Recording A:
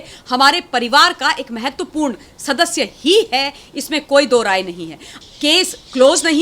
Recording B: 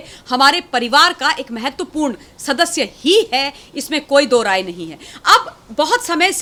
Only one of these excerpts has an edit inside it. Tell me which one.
A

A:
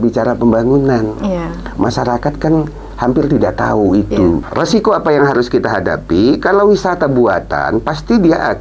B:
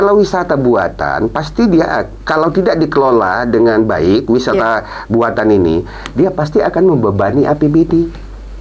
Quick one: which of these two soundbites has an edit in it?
A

